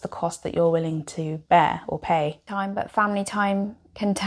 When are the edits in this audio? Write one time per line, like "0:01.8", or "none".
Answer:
0:02.4

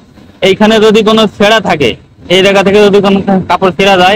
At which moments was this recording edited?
none

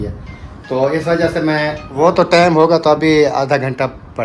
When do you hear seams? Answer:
0:01.8

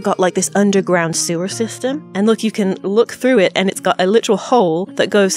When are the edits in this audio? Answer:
none

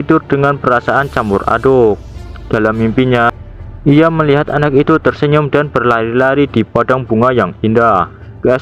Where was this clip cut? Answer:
none

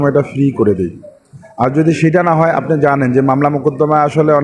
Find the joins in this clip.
none

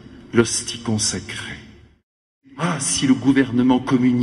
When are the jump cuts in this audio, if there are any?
0:02.4

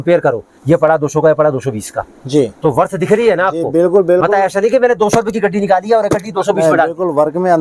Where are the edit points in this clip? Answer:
none

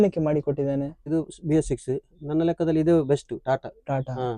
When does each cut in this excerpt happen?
0:01.0

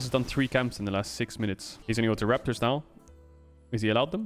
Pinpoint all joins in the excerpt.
0:01.8

